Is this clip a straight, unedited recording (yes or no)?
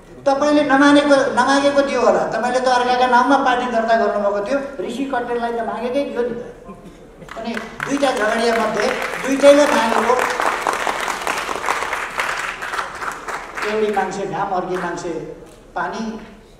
yes